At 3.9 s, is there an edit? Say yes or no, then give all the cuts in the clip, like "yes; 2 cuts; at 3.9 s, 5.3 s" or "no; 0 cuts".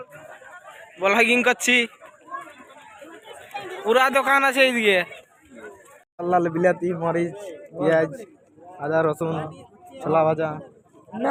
no; 0 cuts